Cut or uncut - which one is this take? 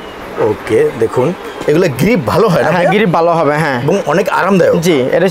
uncut